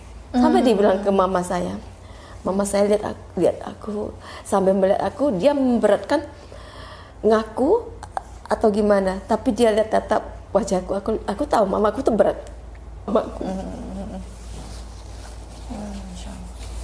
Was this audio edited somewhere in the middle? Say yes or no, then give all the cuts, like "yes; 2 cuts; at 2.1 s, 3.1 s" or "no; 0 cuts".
yes; 1 cut; at 13.1 s